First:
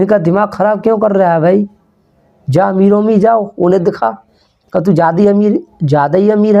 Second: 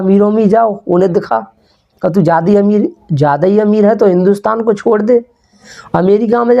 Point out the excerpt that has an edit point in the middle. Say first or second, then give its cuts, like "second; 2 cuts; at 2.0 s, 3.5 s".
second; 1 cut; at 5.7 s